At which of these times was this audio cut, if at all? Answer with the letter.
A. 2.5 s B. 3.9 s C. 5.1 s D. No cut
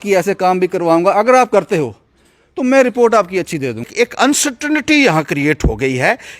B